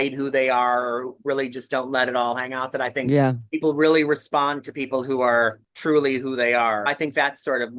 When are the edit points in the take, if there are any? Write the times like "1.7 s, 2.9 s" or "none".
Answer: 5.7 s, 6.9 s